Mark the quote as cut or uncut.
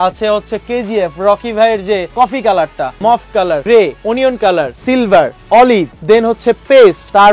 cut